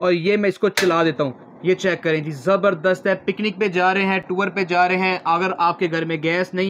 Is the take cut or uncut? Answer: uncut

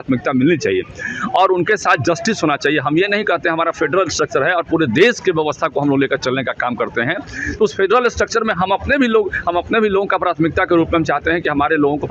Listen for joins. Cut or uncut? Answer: uncut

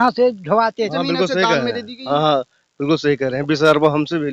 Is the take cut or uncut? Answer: cut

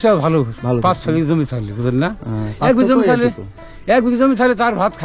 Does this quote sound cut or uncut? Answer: uncut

